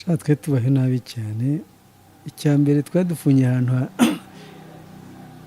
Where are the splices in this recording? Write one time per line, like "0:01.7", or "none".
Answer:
none